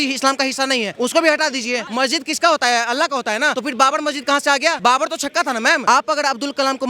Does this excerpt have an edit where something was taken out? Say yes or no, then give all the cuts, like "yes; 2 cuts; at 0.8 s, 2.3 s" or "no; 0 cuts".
yes; 5 cuts; at 0.9 s, 1.8 s, 3.6 s, 4.8 s, 5.8 s